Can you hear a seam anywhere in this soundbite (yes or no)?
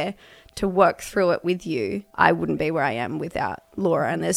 yes